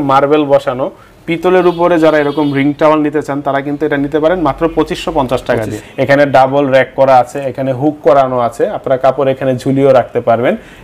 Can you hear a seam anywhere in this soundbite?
yes; 1 cut; at 5.8 s

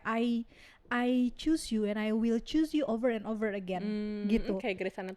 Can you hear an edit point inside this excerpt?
no; 0 cuts

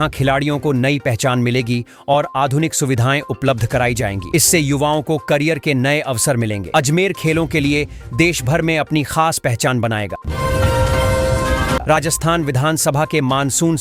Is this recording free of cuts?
no; 2 cuts; at 10.2 s, 11.8 s

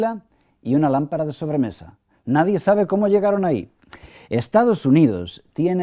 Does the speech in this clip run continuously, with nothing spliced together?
no; 1 cut; at 1.1 s

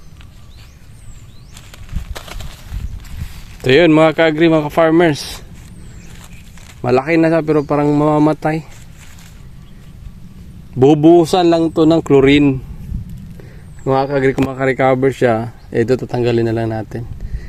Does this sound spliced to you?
no; 0 cuts

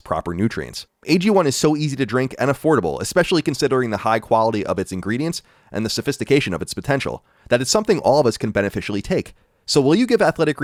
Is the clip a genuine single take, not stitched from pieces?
yes; 0 cuts

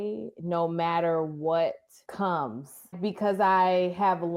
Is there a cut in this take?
yes; 2 cuts; at 2.0 s, 2.9 s

